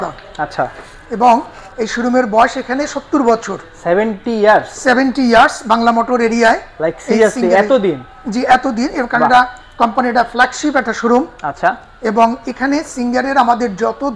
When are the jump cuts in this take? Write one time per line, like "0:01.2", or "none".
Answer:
none